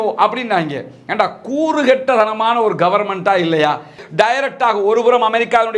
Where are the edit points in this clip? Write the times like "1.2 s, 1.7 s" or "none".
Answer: 4.0 s